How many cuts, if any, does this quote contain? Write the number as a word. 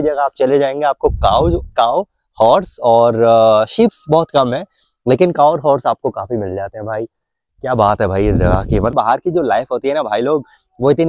one